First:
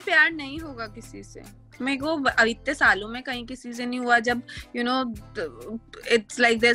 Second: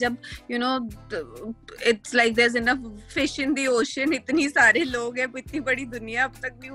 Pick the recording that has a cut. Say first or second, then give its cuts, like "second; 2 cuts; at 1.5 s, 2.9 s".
first; 1 cut; at 1.5 s